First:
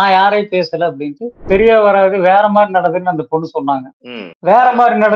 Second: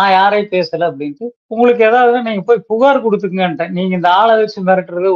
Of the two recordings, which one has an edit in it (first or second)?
first